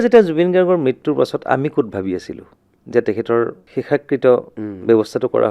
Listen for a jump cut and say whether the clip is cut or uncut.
cut